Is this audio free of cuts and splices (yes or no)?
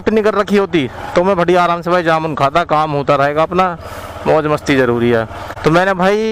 yes